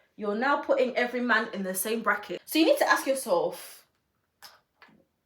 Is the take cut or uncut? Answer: cut